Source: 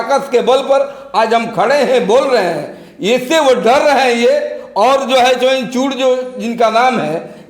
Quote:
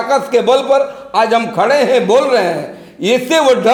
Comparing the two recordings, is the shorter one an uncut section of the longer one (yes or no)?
yes